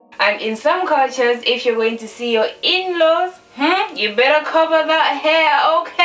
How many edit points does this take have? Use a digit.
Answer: 0